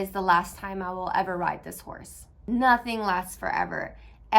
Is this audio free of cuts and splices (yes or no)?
no